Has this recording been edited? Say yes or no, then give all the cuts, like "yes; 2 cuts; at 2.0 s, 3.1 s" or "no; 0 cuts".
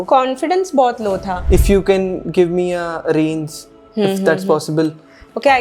yes; 1 cut; at 1.3 s